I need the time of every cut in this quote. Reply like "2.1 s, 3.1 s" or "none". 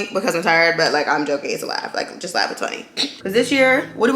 3.0 s